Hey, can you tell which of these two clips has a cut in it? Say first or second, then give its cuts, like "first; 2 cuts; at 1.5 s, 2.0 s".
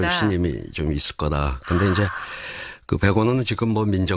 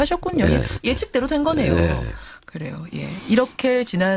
first; 1 cut; at 2.7 s